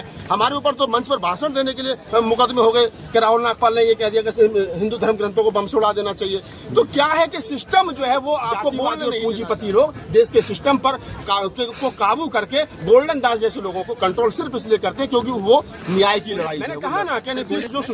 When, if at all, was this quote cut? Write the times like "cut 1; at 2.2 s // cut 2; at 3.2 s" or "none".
cut 1; at 9.0 s // cut 2; at 16.7 s